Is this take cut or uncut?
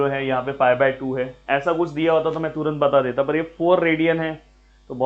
uncut